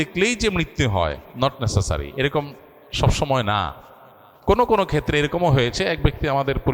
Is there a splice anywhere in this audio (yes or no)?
no